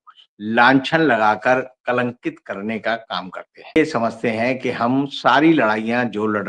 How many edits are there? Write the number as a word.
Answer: one